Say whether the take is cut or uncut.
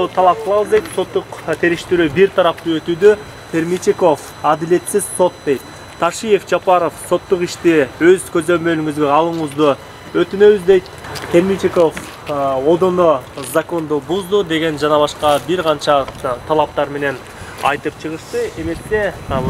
uncut